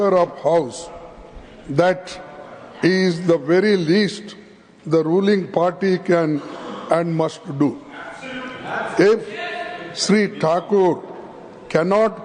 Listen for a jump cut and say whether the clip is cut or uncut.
uncut